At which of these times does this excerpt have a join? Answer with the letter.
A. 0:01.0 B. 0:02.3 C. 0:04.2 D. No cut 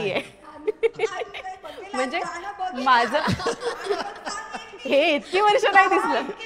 D